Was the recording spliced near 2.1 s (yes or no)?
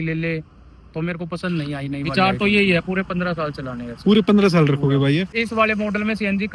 yes